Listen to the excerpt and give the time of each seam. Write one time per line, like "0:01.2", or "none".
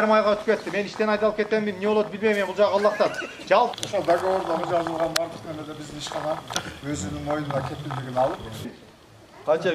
0:03.8
0:08.8